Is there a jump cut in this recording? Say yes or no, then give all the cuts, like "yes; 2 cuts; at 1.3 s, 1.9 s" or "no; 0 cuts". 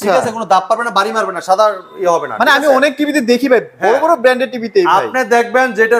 no; 0 cuts